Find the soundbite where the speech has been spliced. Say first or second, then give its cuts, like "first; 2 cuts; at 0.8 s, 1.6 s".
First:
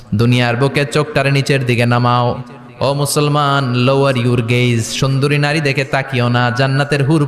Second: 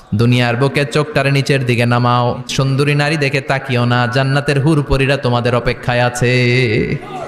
second; 1 cut; at 2.5 s